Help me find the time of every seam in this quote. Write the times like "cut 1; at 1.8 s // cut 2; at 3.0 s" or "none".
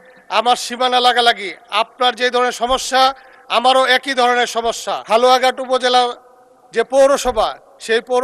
cut 1; at 4.9 s